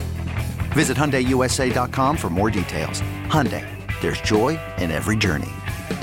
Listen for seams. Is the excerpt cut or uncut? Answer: uncut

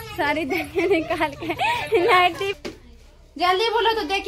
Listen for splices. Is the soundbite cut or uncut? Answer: cut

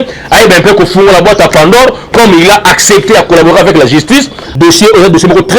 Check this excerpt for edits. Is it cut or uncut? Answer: cut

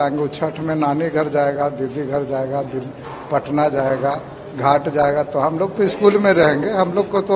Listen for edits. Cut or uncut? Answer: uncut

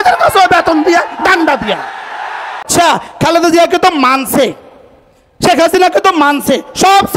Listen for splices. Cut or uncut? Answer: cut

